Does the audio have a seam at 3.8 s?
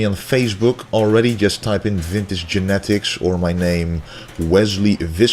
yes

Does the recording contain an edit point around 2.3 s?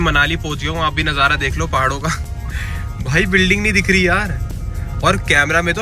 no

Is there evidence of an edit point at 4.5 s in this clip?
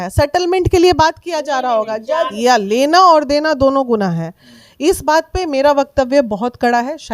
no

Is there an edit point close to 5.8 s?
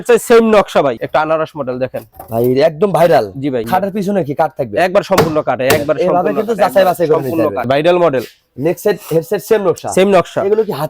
no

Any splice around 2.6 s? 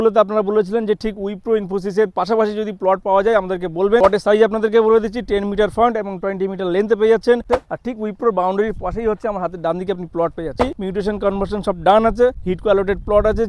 no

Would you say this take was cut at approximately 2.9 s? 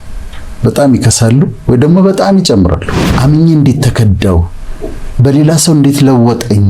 yes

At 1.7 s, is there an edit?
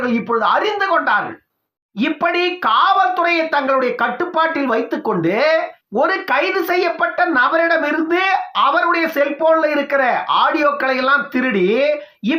yes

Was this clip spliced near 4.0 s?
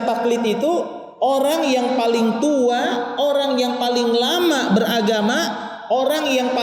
no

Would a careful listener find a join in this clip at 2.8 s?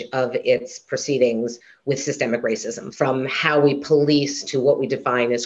yes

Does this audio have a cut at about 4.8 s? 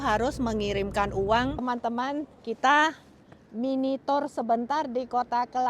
no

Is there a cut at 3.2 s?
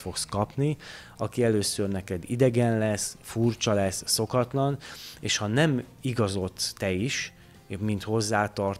no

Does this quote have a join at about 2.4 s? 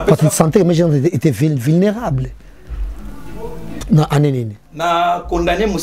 no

